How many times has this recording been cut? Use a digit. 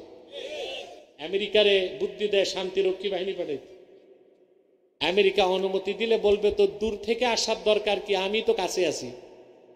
1